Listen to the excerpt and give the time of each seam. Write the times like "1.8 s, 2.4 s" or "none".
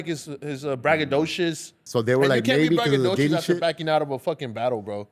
1.8 s